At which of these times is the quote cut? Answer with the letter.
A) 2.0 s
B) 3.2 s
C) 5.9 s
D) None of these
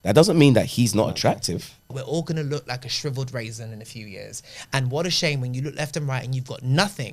A